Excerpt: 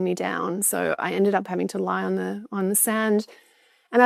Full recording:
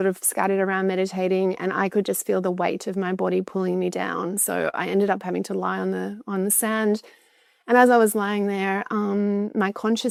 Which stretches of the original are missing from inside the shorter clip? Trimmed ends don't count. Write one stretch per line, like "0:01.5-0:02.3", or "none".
none